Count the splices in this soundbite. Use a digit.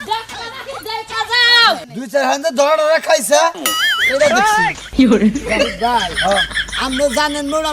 1